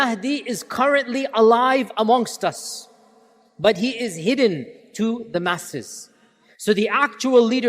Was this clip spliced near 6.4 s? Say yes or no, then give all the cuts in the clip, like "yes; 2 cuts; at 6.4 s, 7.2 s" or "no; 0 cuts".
yes; 1 cut; at 6.4 s